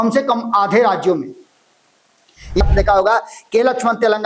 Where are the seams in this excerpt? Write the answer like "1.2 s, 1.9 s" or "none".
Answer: 2.6 s